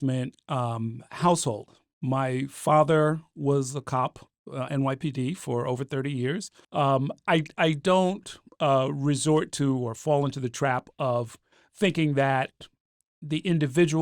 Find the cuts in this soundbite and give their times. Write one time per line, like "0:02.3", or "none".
0:06.6